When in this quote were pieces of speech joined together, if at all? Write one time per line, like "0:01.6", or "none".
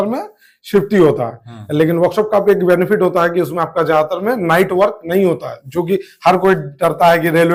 none